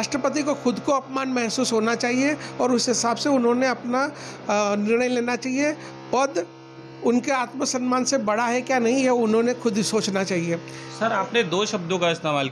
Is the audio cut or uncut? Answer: uncut